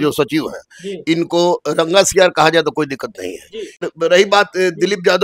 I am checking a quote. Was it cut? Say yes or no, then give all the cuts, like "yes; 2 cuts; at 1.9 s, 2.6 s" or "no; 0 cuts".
yes; 1 cut; at 3.9 s